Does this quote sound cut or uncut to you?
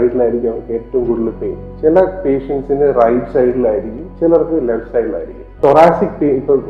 cut